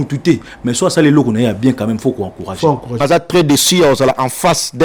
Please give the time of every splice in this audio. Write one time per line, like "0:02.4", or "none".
0:03.0